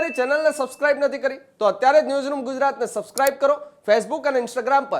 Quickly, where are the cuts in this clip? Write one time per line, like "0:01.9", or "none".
none